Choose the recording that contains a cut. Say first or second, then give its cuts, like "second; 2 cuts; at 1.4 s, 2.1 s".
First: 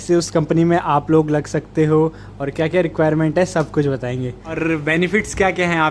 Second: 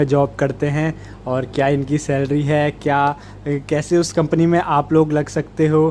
first; 1 cut; at 4.6 s